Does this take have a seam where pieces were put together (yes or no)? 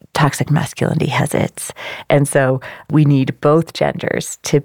yes